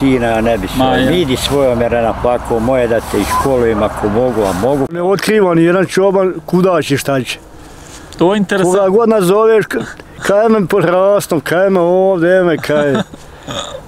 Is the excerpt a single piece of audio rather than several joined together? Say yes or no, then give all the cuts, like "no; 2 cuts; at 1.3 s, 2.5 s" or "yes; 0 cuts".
no; 1 cut; at 4.9 s